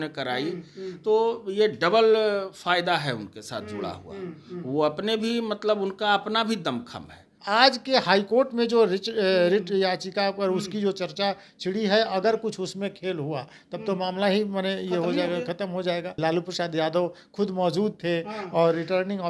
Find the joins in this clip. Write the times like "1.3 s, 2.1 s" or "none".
7.3 s, 16.2 s